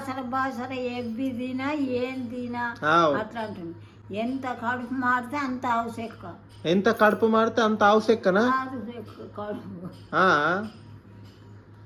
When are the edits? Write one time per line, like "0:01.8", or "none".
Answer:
none

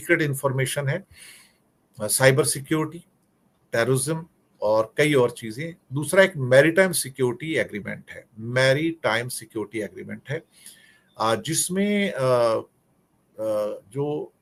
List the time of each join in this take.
none

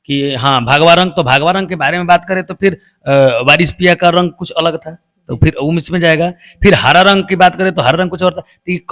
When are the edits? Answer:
none

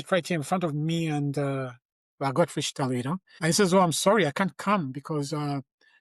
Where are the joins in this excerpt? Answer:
0:03.3

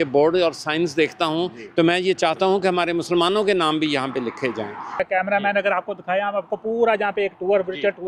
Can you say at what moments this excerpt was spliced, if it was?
none

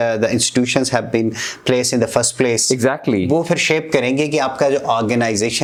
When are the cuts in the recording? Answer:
none

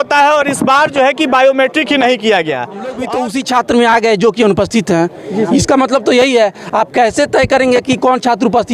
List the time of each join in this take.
0:02.6

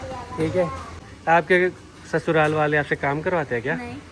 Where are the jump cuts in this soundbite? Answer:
0:01.0

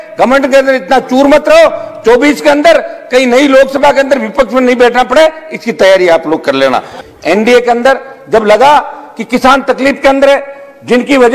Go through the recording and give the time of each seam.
0:07.0

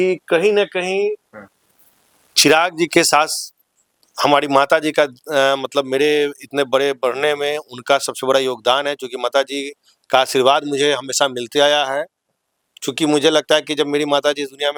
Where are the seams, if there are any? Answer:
none

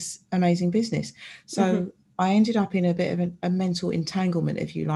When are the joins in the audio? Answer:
none

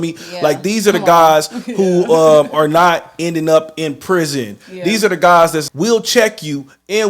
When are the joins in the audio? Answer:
0:05.6

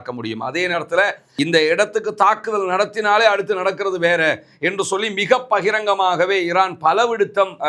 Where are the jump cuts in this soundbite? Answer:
0:01.2

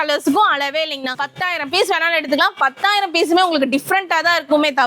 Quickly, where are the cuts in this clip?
0:01.2

